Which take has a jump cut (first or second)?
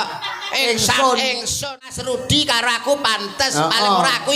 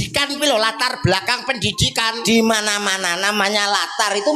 first